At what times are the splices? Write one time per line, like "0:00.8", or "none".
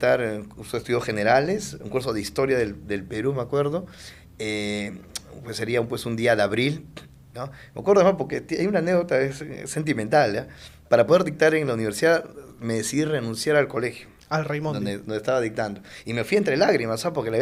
none